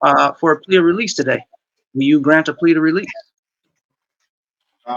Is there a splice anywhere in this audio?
no; 0 cuts

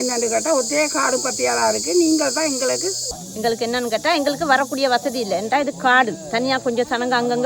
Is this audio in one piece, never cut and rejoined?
no; 1 cut; at 3.1 s

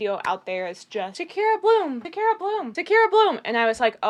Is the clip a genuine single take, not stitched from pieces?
yes; 0 cuts

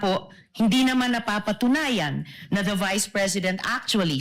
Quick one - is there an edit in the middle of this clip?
no; 0 cuts

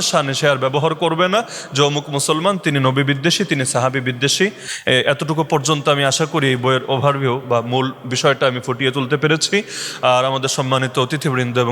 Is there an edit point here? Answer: no; 0 cuts

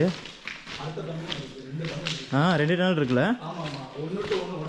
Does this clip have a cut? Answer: no; 0 cuts

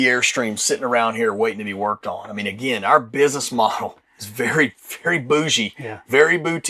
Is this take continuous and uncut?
yes; 0 cuts

